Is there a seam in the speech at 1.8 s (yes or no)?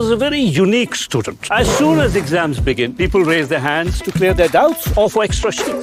no